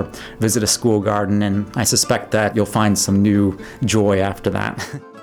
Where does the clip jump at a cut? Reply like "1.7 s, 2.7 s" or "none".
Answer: 1.7 s, 2.5 s